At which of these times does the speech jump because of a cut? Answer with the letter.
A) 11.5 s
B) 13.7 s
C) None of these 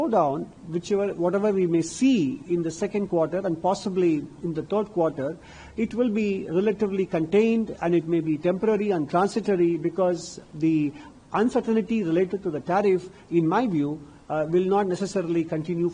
C